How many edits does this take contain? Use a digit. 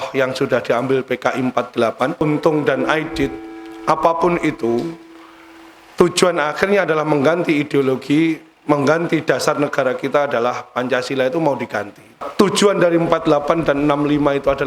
2